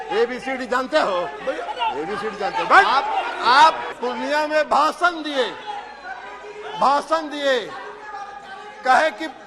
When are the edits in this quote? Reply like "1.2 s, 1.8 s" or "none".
3.9 s